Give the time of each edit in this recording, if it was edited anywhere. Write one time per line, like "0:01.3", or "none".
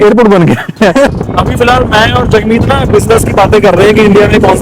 0:01.1